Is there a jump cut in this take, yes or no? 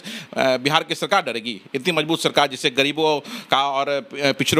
no